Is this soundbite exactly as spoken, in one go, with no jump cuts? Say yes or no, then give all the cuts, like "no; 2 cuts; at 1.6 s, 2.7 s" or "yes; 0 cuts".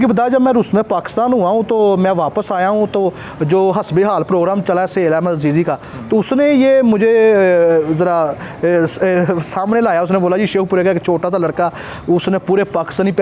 yes; 0 cuts